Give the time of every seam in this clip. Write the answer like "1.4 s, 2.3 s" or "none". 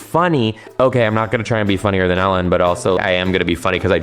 0.7 s, 3.0 s